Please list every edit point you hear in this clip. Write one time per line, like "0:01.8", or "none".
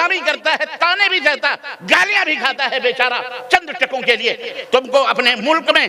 0:04.5